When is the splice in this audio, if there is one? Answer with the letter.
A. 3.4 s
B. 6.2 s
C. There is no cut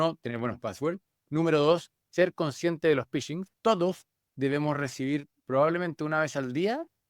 A